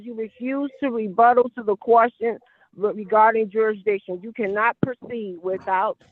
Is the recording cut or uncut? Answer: uncut